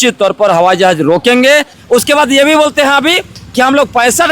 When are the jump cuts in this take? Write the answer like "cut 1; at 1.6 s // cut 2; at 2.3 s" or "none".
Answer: cut 1; at 1.7 s